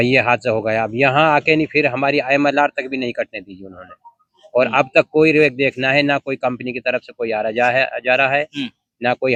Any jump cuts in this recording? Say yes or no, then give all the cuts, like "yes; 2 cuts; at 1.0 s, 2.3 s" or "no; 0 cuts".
no; 0 cuts